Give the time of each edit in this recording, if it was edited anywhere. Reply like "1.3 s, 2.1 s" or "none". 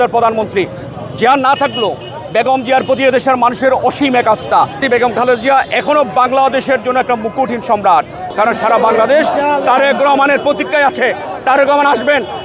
4.8 s, 8.2 s